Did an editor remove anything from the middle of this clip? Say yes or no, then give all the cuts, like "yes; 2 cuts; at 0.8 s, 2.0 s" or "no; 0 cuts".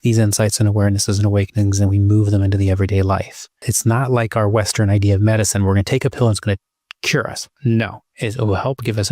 yes; 2 cuts; at 3.7 s, 8.0 s